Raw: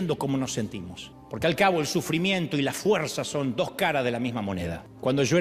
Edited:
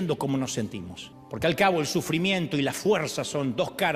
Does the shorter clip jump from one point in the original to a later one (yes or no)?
no